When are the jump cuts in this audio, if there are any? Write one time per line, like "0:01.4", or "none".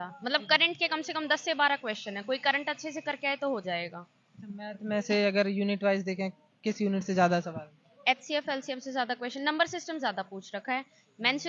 none